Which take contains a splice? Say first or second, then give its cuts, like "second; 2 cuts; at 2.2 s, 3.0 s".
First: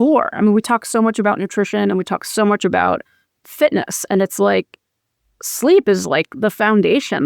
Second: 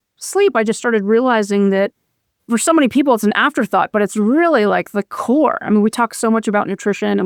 first; 1 cut; at 3.4 s